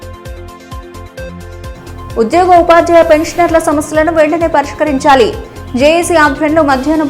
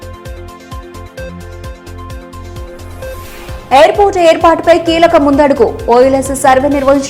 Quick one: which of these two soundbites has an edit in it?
first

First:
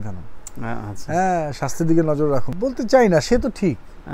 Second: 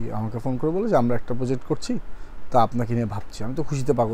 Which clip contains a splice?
first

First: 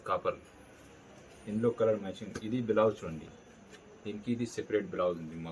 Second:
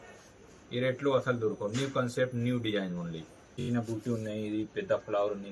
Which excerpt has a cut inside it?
second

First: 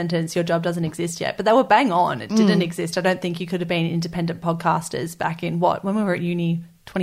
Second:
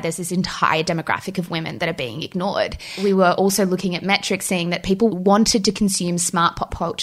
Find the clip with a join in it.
second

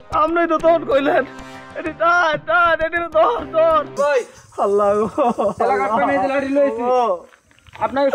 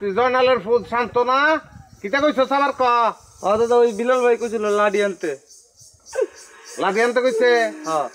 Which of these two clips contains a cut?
first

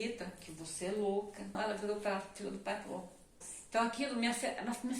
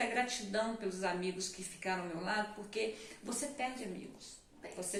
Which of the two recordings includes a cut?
first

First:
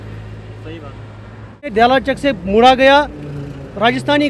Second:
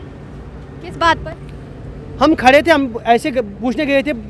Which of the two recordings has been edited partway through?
first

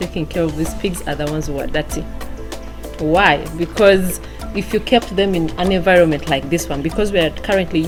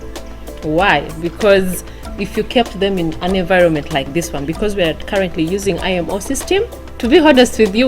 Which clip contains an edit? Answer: second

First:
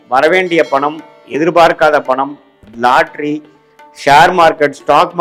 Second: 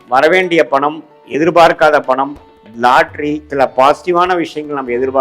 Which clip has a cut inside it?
second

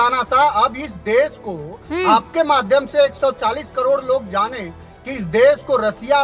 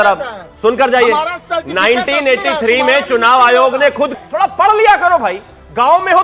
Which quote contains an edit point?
second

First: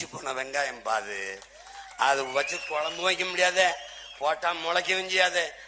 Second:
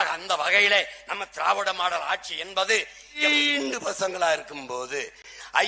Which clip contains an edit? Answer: second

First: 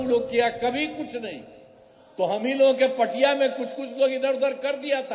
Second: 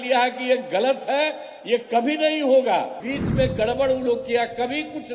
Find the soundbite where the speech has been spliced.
second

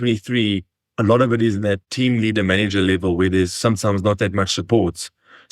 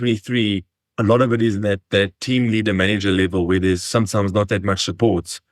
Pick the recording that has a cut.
first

